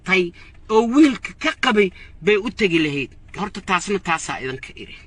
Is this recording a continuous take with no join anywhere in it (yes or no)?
yes